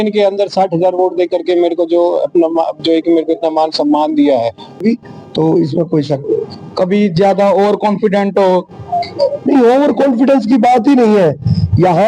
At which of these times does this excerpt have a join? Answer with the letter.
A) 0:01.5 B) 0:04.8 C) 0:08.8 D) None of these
B